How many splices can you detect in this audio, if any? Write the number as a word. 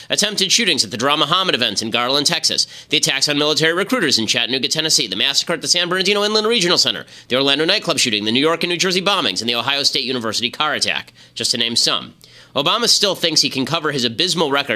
zero